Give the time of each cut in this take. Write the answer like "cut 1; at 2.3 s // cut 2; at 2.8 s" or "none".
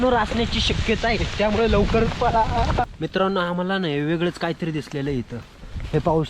cut 1; at 2.9 s